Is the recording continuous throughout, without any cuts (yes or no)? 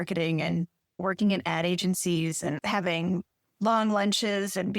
yes